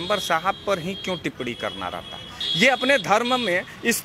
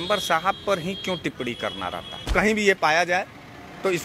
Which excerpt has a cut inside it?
second; 1 cut; at 2.3 s

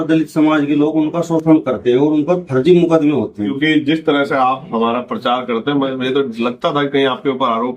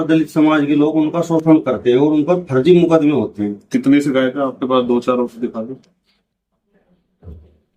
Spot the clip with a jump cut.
first; 1 cut; at 3.6 s

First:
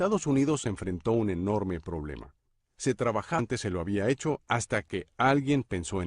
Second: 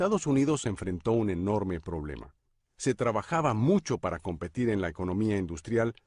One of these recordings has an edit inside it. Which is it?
second; 1 cut; at 3.4 s

